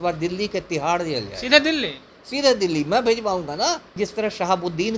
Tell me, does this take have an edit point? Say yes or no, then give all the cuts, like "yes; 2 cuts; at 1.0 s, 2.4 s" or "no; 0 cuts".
yes; 1 cut; at 3.9 s